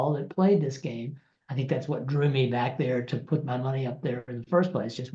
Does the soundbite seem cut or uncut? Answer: uncut